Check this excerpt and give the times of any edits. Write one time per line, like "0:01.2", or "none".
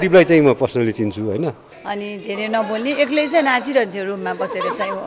0:01.7